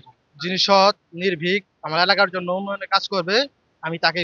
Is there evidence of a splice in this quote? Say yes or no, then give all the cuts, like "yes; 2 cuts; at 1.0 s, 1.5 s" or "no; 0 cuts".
no; 0 cuts